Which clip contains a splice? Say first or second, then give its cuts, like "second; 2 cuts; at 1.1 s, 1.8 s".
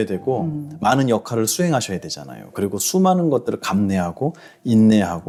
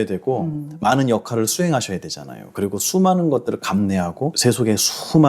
second; 1 cut; at 4.4 s